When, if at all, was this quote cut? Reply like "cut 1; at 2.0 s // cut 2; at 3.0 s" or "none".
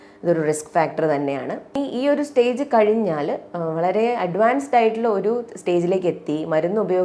cut 1; at 1.7 s